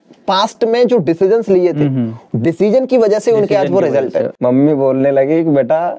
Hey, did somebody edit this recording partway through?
yes; 1 cut; at 4.3 s

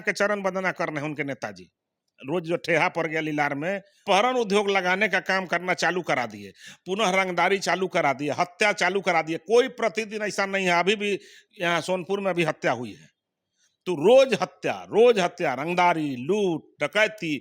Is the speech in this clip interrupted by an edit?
yes; 1 cut; at 3.9 s

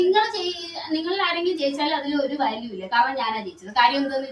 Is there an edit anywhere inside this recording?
no; 0 cuts

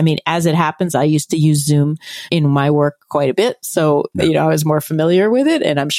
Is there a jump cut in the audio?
yes; 1 cut; at 2.3 s

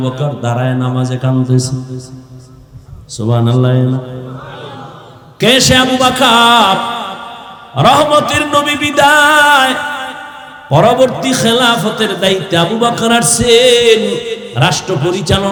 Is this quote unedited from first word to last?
yes; 0 cuts

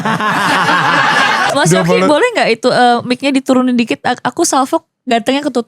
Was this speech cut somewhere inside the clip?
yes; 1 cut; at 1.5 s

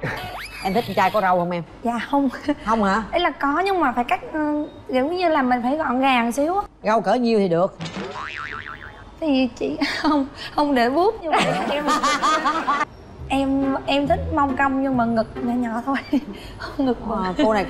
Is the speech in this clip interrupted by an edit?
yes; 1 cut; at 12.9 s

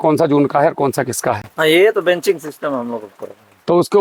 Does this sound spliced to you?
no; 0 cuts

